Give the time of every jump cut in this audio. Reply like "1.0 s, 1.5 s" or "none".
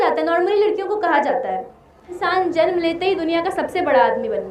2.2 s